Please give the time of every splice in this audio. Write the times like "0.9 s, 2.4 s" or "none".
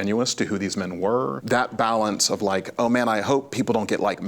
1.3 s